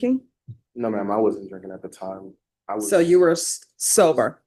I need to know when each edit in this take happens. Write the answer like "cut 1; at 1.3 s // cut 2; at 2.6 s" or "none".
none